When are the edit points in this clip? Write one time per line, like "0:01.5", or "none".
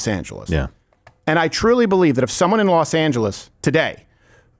none